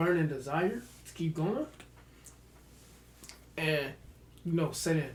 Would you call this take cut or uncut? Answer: uncut